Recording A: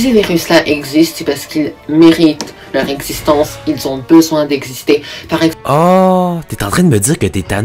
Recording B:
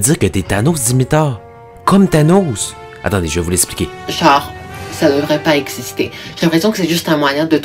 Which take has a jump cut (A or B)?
B